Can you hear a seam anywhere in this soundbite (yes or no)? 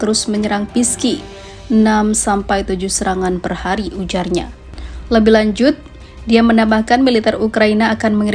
no